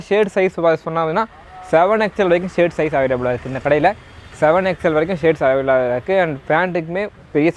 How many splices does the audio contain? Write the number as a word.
zero